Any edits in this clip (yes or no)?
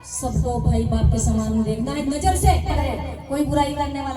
yes